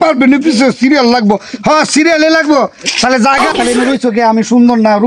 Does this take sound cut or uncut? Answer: cut